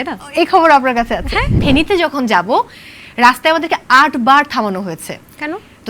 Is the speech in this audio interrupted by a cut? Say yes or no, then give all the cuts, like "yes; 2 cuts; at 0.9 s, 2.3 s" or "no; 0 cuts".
yes; 1 cut; at 1.5 s